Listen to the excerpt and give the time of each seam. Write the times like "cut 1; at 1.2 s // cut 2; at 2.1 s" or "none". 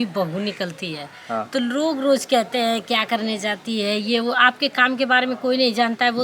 none